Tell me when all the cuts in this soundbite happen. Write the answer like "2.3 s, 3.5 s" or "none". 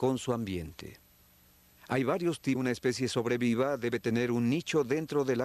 none